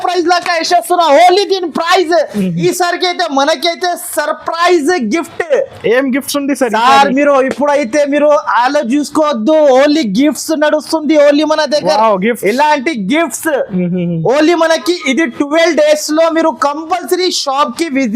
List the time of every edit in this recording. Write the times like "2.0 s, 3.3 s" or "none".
2.6 s